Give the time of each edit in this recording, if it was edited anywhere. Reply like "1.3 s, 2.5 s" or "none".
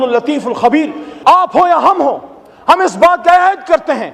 1.0 s